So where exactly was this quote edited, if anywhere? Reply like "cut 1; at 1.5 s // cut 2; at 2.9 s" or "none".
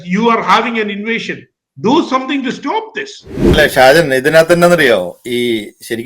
cut 1; at 3.4 s

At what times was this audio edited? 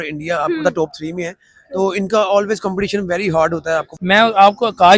cut 1; at 3.9 s

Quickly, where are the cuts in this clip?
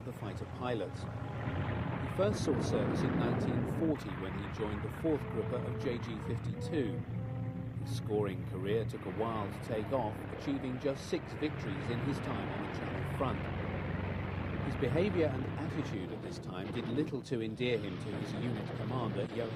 cut 1; at 14.0 s

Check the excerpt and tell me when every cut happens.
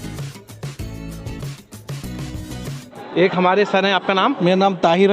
cut 1; at 3.0 s

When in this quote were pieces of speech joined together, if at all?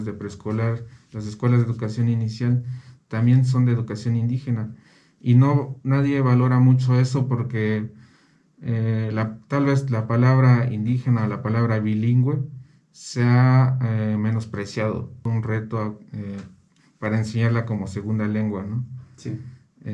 cut 1; at 15.2 s

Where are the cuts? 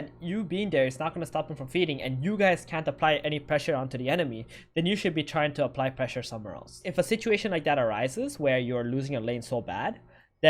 cut 1; at 6.9 s

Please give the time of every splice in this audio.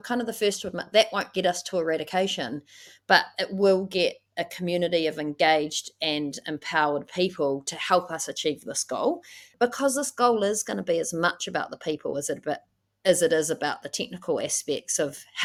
none

